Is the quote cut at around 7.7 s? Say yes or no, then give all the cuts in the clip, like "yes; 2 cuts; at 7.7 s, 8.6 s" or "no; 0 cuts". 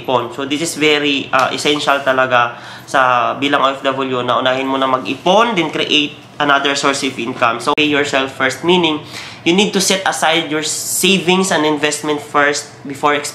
yes; 1 cut; at 7.7 s